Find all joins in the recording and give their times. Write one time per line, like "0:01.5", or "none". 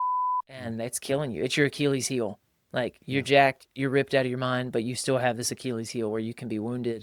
none